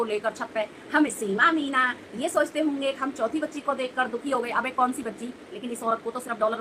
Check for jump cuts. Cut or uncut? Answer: cut